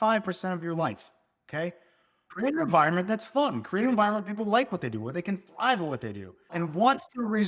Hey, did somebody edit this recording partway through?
yes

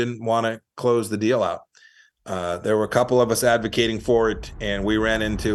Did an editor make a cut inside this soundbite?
no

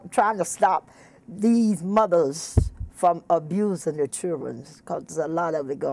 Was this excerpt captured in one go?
yes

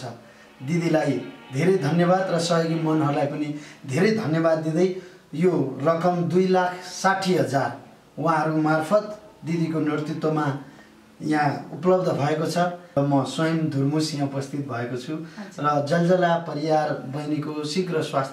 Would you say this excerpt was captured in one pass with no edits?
no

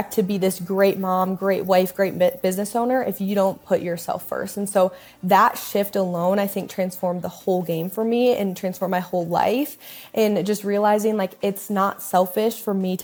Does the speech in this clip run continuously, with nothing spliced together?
yes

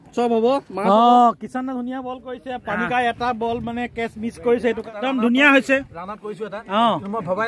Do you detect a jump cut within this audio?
yes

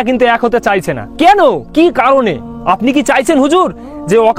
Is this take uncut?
no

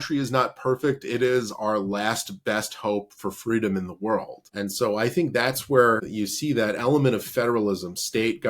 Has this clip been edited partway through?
yes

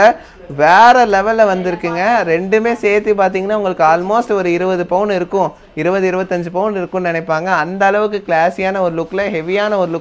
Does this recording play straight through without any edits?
yes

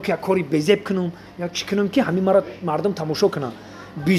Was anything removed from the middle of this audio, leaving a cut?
no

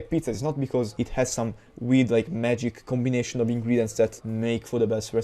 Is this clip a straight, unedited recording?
no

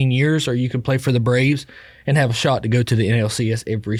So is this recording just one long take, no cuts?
yes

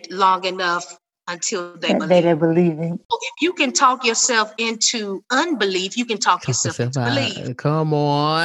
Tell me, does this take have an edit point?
yes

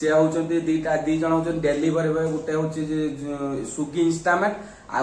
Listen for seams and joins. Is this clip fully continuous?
yes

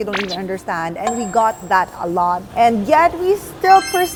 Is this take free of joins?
yes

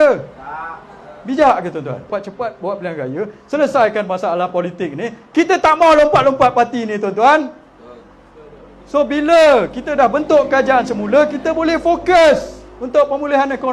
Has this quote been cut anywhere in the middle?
yes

